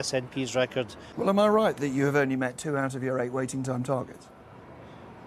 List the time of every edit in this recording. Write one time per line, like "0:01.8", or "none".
0:01.0